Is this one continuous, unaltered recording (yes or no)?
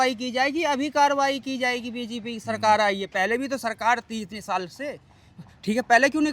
yes